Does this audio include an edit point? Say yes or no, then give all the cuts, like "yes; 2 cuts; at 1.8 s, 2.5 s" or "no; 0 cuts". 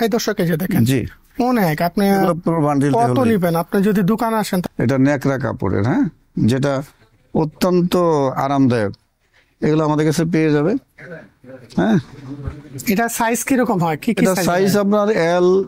yes; 1 cut; at 4.6 s